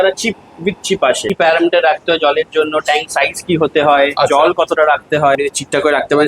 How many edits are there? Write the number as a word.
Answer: two